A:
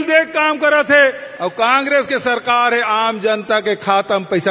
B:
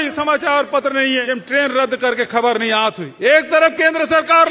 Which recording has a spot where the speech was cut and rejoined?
B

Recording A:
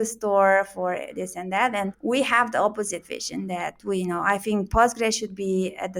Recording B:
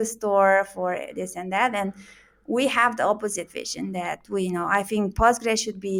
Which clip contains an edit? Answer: A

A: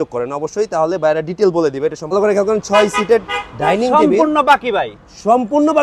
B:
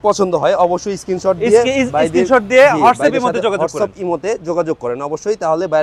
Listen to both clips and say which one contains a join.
A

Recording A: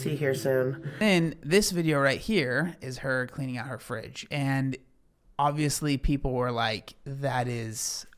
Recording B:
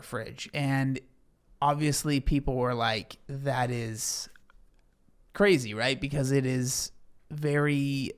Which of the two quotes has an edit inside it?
A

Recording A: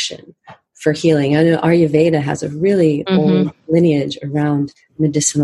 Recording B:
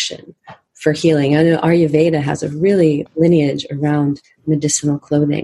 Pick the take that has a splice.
B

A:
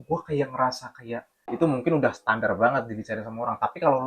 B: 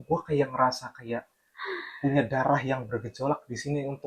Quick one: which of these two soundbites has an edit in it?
A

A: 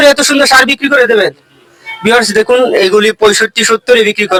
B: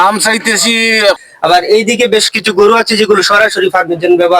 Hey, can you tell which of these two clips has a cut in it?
B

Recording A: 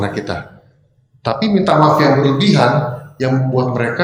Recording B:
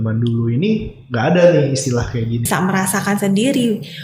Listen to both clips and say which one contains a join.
B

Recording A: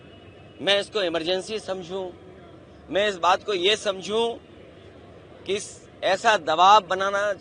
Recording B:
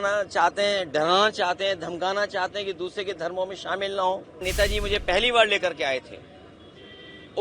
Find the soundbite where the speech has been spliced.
B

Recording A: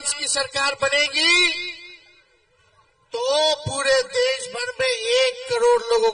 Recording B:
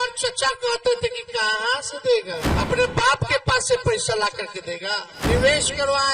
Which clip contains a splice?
B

